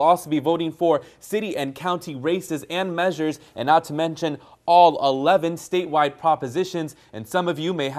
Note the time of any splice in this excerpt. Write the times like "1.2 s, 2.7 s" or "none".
none